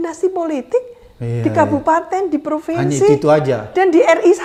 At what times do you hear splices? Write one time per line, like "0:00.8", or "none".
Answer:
none